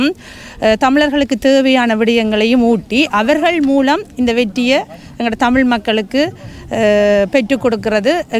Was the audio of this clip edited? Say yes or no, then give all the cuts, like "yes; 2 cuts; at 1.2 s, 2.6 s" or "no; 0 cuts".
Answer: no; 0 cuts